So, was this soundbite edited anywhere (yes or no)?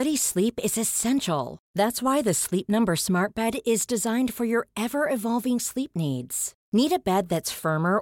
no